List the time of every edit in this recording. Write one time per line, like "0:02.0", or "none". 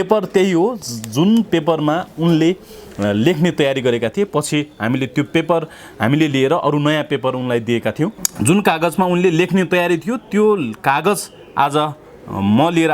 0:08.3